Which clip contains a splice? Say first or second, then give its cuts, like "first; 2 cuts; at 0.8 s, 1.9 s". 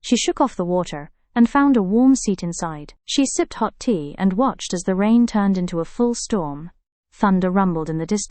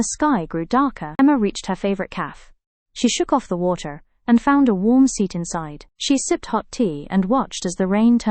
second; 1 cut; at 1.1 s